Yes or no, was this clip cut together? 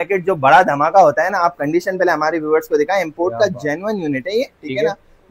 no